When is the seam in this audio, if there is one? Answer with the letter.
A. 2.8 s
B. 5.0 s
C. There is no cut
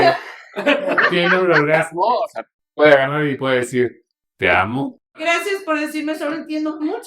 B